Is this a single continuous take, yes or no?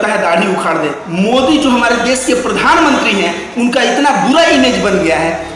no